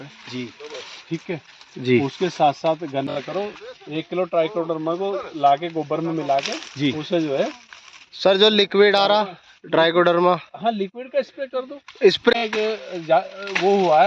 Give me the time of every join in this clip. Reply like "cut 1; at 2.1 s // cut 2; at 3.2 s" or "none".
cut 1; at 3.1 s // cut 2; at 12.4 s